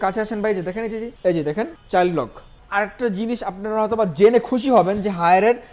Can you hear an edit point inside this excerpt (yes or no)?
yes